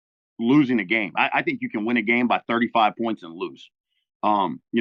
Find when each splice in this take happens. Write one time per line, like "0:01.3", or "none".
none